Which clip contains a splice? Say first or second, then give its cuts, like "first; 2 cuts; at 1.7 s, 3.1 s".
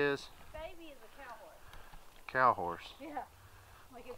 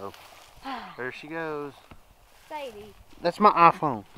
second; 1 cut; at 3.1 s